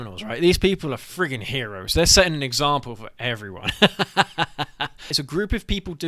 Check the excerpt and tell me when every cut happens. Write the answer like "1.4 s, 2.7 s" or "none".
5.2 s